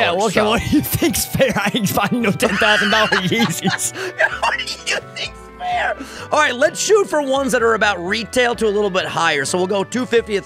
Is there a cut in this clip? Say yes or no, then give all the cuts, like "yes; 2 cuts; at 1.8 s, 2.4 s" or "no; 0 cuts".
no; 0 cuts